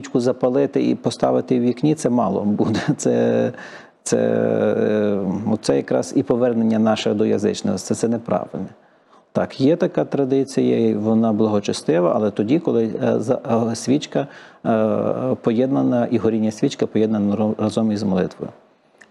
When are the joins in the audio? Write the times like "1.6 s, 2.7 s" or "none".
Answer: none

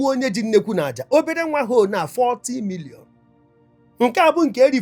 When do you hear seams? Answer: none

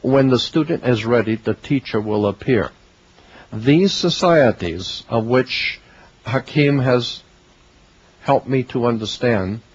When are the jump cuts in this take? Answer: 3.7 s

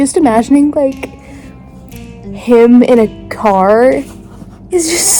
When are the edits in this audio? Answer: none

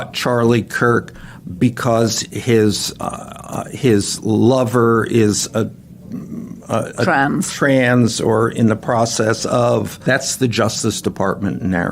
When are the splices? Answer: 10.0 s

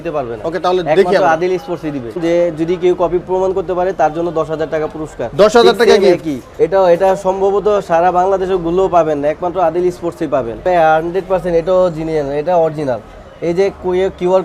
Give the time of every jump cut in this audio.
2.2 s, 6.4 s, 10.6 s

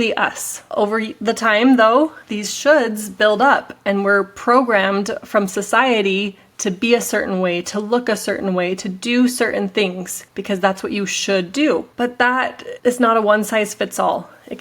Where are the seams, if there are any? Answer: 11.9 s

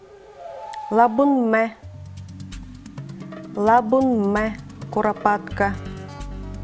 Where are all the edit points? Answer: 1.9 s, 3.5 s, 5.8 s

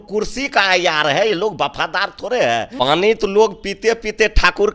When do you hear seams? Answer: 2.7 s

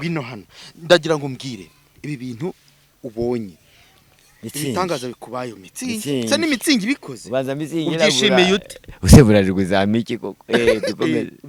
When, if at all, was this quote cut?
none

